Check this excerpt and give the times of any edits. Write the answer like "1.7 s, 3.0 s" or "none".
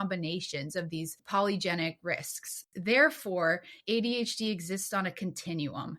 1.2 s, 2.7 s